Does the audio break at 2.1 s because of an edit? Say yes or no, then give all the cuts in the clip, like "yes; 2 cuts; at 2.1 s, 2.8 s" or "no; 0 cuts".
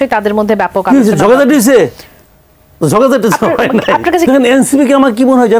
no; 1 cut; at 4.3 s